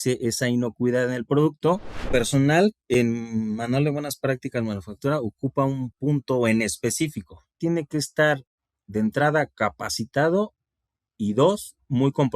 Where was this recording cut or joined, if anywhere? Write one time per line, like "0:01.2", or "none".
0:02.1
0:07.6